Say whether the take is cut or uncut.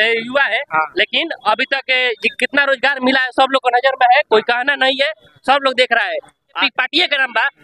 cut